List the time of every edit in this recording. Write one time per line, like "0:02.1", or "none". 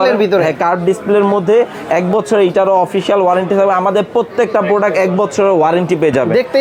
none